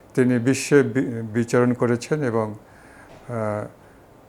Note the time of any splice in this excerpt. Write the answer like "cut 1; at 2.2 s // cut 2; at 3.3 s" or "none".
none